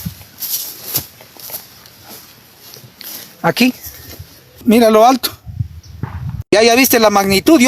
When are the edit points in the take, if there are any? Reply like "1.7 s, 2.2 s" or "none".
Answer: 4.6 s

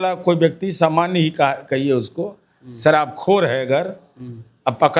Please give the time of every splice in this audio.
none

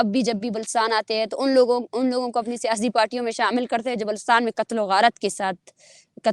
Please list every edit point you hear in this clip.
none

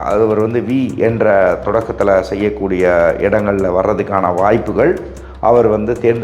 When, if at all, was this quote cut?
none

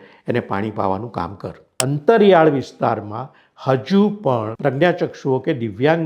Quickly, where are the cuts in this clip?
1.6 s, 4.5 s

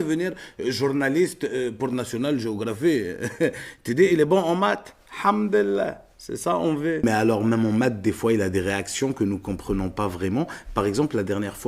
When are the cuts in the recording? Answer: 7.0 s

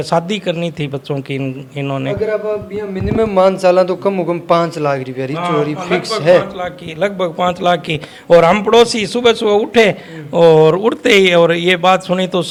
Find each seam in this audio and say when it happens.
none

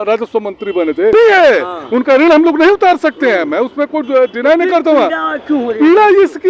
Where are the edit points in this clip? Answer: 1.1 s

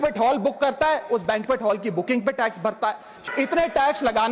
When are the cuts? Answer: 3.2 s

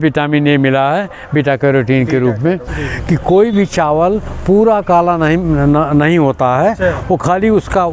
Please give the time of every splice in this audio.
2.8 s

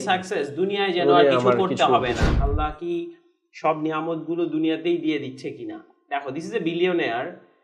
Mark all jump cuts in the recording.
2.3 s

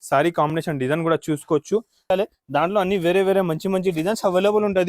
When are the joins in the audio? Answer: 2.1 s

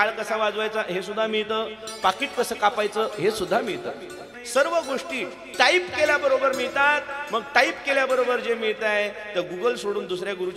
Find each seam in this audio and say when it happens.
4.3 s

